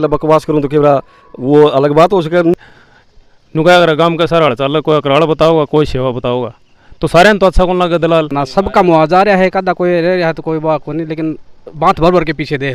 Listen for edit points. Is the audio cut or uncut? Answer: cut